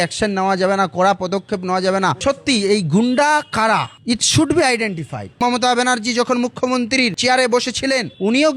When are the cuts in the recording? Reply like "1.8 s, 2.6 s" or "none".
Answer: 5.4 s